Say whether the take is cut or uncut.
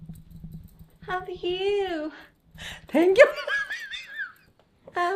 uncut